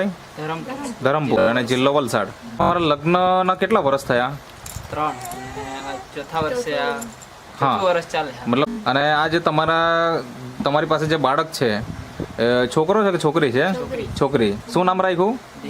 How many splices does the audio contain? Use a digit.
2